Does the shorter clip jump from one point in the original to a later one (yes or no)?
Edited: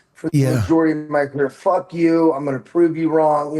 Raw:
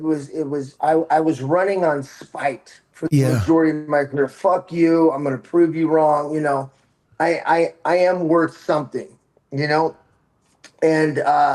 no